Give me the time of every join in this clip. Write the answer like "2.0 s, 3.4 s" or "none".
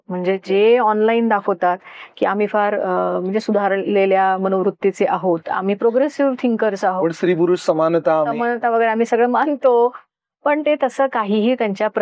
5.5 s